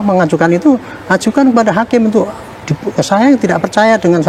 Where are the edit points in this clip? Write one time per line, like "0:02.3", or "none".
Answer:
none